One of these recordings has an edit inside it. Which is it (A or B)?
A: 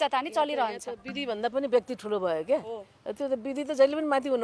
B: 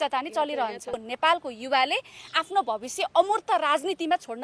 B